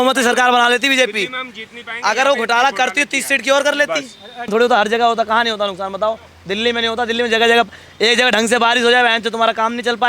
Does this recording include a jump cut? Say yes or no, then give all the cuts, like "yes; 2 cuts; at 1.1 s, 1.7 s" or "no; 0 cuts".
yes; 1 cut; at 4.5 s